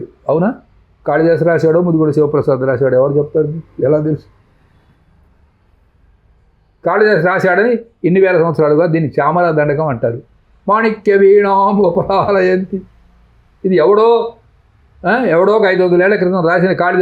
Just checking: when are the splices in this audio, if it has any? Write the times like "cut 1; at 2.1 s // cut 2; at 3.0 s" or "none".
none